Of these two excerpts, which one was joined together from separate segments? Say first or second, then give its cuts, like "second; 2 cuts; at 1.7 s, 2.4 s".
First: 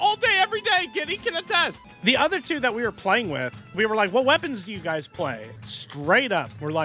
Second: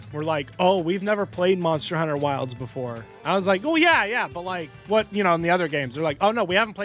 first; 3 cuts; at 1.8 s, 3.7 s, 5.5 s